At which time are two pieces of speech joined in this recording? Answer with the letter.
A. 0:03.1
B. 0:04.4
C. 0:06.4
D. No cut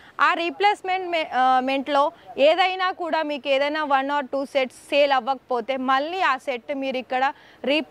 D